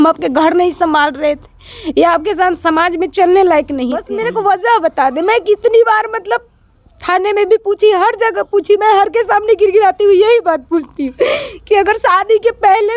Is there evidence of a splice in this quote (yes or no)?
no